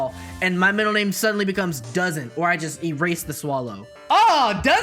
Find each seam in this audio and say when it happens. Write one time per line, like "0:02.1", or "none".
0:03.9